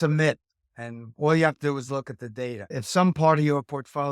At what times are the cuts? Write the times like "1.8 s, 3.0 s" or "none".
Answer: 2.8 s